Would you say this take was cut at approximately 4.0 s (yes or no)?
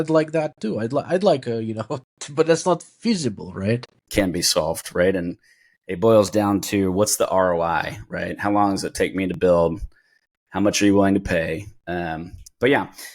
yes